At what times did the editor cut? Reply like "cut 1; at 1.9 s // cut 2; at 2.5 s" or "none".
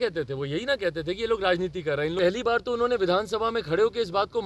cut 1; at 2.2 s